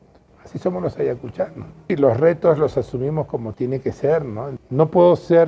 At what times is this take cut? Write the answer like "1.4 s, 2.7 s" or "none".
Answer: 1.9 s, 4.5 s